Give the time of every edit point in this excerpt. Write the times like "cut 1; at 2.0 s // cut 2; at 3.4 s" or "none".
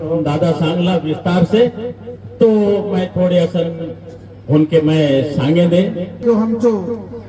cut 1; at 6.2 s